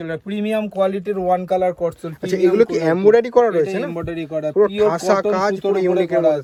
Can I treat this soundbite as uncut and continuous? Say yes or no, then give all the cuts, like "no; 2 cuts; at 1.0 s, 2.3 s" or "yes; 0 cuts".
yes; 0 cuts